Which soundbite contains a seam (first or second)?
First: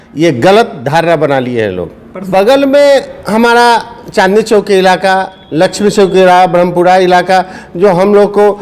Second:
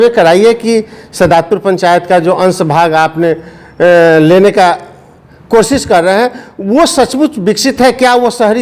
first